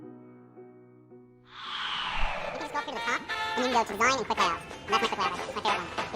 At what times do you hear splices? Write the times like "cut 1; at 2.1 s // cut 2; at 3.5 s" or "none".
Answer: cut 1; at 1.4 s // cut 2; at 2.6 s